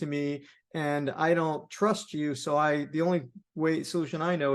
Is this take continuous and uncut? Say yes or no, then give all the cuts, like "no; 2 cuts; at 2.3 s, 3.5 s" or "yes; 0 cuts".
yes; 0 cuts